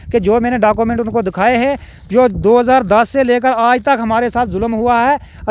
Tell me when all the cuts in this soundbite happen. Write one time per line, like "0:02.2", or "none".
none